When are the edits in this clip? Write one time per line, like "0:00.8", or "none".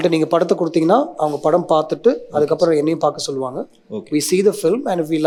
none